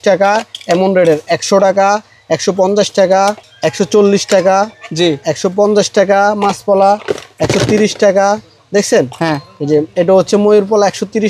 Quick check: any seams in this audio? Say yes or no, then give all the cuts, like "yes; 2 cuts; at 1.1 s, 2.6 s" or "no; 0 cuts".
no; 0 cuts